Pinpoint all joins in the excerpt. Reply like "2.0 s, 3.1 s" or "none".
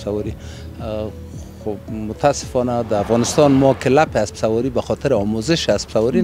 none